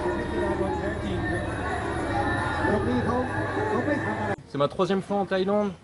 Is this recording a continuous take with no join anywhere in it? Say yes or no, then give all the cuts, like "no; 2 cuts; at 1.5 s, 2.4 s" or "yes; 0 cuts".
no; 1 cut; at 4.3 s